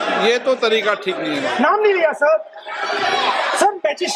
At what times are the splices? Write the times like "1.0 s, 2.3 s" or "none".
none